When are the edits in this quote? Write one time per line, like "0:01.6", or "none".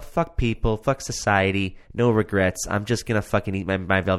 none